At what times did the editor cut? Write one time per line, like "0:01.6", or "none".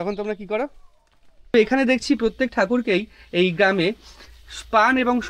0:01.5